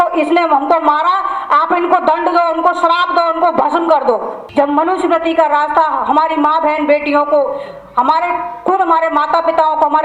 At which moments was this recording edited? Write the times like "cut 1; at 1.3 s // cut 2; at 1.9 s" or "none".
cut 1; at 4.4 s